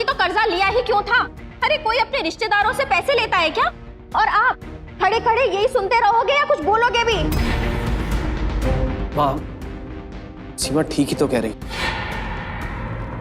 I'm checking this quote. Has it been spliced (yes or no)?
no